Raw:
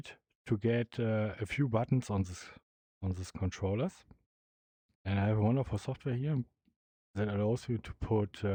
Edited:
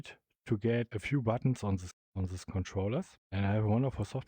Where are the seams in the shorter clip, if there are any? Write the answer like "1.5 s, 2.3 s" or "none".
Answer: 0.9 s, 2.0 s, 3.2 s